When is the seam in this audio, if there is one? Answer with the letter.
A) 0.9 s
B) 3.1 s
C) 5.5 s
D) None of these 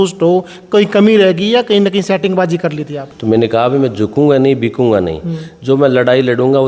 B